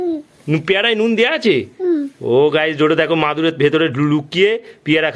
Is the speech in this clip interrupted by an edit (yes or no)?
no